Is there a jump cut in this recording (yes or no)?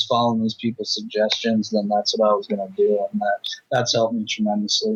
no